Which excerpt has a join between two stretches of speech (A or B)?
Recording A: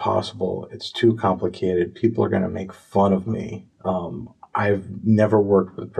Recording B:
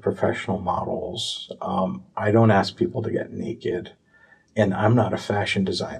A